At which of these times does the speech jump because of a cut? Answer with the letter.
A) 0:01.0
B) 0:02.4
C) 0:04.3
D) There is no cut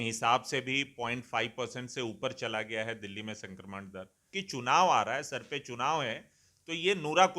C